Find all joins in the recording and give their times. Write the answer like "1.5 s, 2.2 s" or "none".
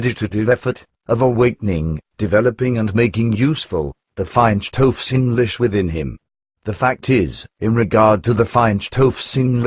7.6 s